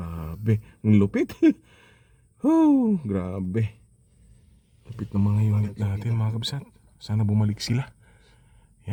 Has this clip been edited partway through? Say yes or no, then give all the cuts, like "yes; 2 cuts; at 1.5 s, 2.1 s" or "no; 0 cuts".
no; 0 cuts